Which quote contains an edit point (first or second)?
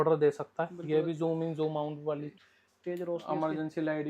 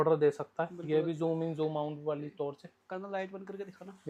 first